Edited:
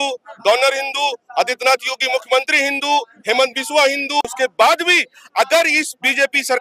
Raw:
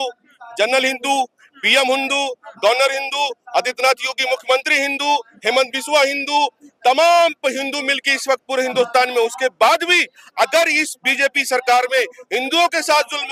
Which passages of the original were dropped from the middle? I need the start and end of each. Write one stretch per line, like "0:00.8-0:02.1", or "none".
0:06.4-0:09.3